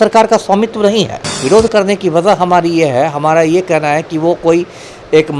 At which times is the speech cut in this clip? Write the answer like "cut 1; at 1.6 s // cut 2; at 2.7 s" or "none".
cut 1; at 1.3 s